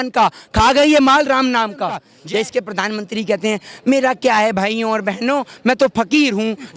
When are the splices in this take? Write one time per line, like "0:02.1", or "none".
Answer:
0:02.1